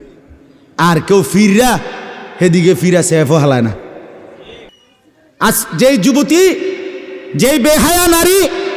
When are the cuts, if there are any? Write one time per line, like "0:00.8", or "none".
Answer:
0:04.7